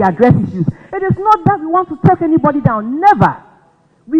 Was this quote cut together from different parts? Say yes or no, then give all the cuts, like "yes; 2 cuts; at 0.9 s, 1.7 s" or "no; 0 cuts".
no; 0 cuts